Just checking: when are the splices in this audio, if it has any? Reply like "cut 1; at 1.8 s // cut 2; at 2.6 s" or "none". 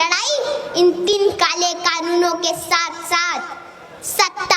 cut 1; at 1.1 s